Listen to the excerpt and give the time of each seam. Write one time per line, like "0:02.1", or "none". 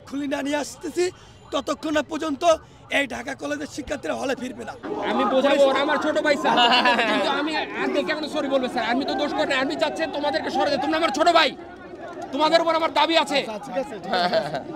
0:04.8